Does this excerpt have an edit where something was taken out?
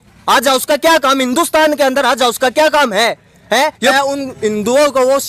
yes; 1 cut; at 3.7 s

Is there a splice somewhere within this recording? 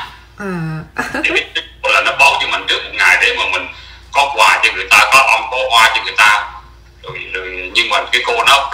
no; 0 cuts

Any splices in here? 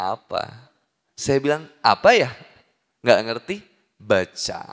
no; 0 cuts

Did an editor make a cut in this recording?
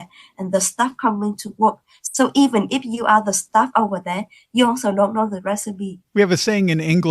yes; 1 cut; at 6.0 s

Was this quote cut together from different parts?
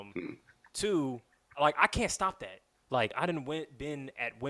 yes; 2 cuts; at 1.5 s, 3.1 s

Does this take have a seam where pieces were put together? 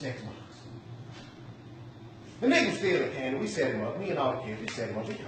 no; 0 cuts

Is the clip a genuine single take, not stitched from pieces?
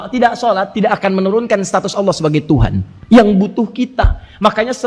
yes; 0 cuts

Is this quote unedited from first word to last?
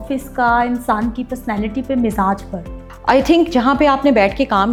yes; 0 cuts

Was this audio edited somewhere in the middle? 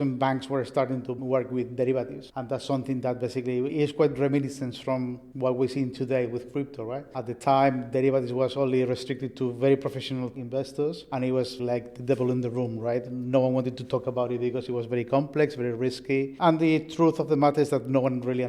yes; 4 cuts; at 1.2 s, 3.7 s, 10.3 s, 11.6 s

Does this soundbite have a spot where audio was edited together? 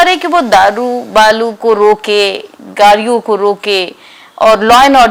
no; 0 cuts

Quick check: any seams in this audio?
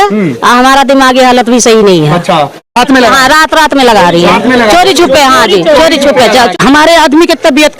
yes; 2 cuts; at 2.8 s, 6.5 s

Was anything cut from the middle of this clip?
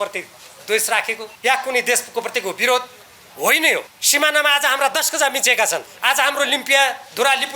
yes; 3 cuts; at 1.2 s, 4.0 s, 5.9 s

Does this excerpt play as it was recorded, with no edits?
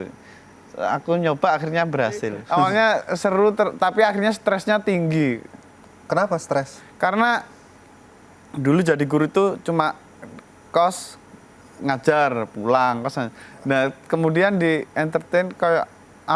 no; 1 cut; at 2.4 s

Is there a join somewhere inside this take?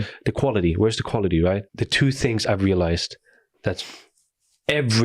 yes; 1 cut; at 1.7 s

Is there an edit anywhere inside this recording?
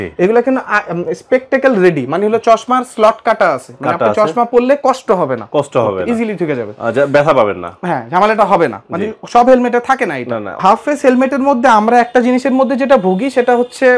yes; 1 cut; at 10.6 s

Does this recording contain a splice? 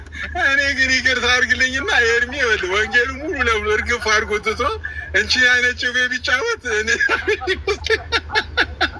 no; 0 cuts

